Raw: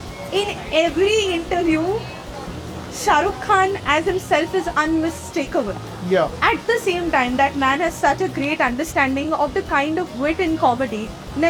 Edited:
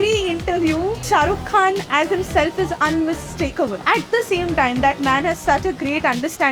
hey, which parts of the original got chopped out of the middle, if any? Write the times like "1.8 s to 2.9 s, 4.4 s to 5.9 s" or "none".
2.0 s to 3.0 s, 5.8 s to 6.4 s